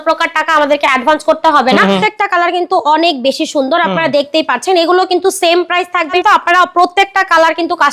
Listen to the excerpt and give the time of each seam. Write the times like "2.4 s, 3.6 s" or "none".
1.8 s, 6.2 s